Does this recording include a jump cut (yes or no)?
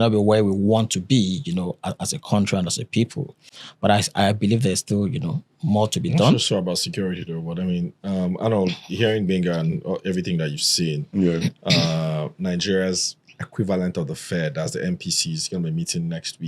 no